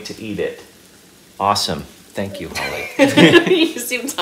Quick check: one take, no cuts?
yes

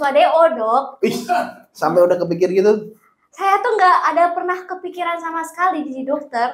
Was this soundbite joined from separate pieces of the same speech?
no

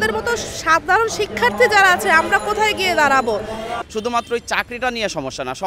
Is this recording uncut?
no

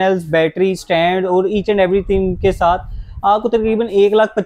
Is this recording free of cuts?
yes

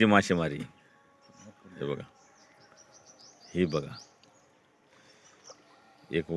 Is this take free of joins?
yes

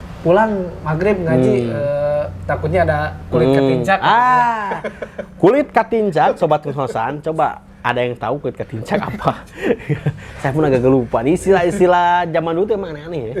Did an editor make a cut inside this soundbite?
no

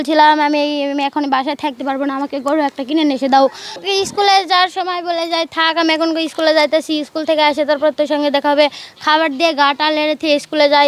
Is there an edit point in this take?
yes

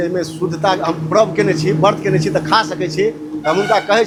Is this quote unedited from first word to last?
yes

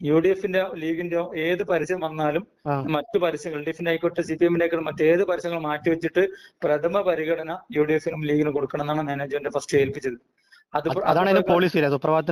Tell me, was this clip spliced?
no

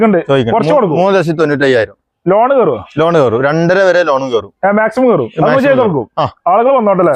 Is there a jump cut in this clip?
no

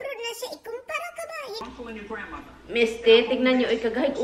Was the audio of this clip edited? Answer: yes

